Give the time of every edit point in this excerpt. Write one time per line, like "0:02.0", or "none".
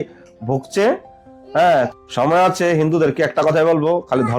0:01.9